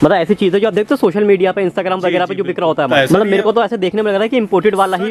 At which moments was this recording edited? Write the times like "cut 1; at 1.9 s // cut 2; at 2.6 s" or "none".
cut 1; at 2.9 s